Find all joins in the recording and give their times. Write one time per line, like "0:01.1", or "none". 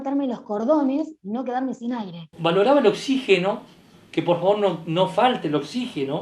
0:02.3